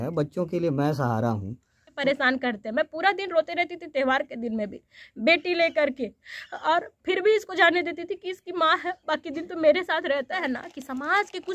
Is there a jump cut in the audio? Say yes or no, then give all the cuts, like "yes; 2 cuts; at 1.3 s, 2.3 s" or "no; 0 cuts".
yes; 2 cuts; at 1.9 s, 10.3 s